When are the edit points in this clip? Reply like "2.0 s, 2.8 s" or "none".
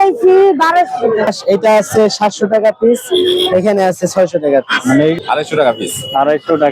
1.3 s, 5.2 s